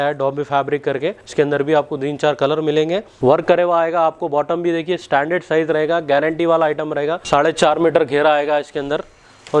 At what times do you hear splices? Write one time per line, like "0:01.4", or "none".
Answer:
0:01.2
0:03.1
0:07.2